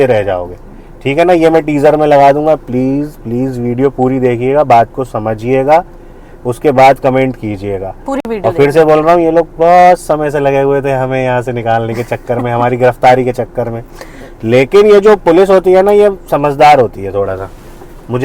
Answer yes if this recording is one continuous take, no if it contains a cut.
yes